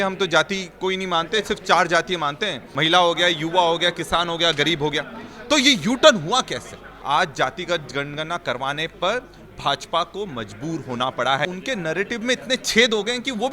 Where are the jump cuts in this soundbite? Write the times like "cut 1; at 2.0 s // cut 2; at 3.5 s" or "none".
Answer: cut 1; at 2.7 s // cut 2; at 6.9 s // cut 3; at 11.5 s